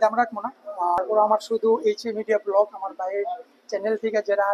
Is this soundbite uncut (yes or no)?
no